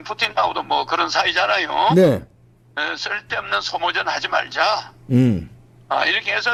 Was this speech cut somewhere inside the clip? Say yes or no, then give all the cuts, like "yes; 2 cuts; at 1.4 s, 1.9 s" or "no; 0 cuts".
no; 0 cuts